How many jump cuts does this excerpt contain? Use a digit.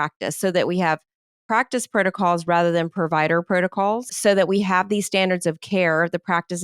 1